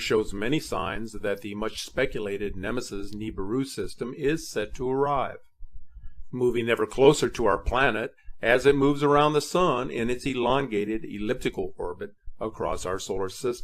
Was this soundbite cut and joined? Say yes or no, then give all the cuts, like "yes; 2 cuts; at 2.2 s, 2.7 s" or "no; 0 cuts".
yes; 1 cut; at 7.6 s